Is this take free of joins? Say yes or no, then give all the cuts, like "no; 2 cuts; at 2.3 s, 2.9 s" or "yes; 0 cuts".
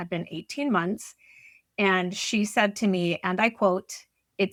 yes; 0 cuts